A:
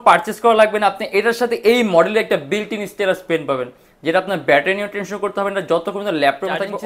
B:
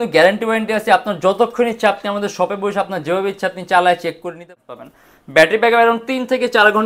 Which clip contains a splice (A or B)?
B